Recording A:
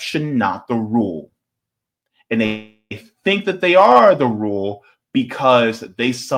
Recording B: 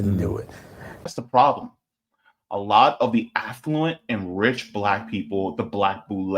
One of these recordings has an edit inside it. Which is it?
B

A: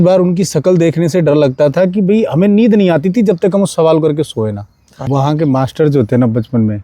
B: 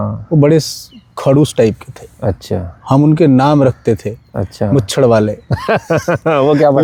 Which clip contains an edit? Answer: A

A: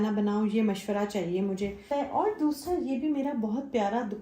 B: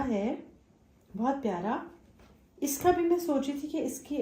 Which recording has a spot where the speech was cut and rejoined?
A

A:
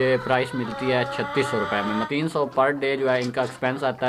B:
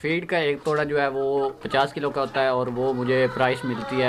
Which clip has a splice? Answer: A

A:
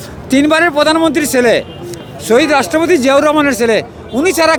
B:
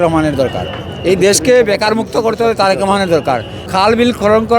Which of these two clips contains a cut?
B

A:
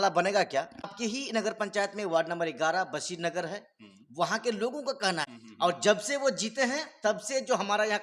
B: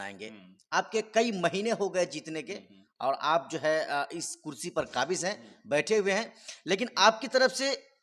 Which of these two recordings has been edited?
A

